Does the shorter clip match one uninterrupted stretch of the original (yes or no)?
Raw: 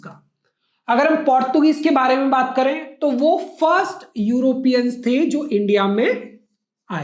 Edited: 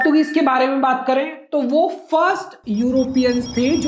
yes